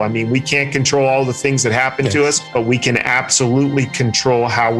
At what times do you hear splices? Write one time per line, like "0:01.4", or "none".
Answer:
none